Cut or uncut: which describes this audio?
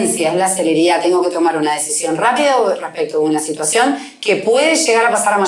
uncut